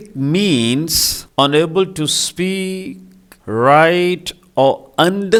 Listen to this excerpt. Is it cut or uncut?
uncut